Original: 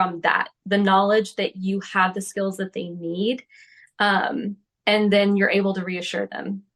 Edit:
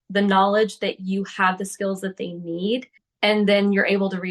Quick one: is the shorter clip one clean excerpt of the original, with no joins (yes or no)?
no